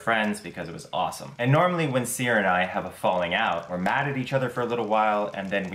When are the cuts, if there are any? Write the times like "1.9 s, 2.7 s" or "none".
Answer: none